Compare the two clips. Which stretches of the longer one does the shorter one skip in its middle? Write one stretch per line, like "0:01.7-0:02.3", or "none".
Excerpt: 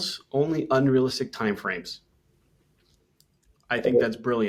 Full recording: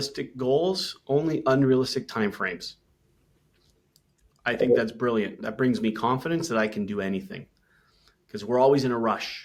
none